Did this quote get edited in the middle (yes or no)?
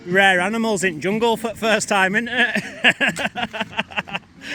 no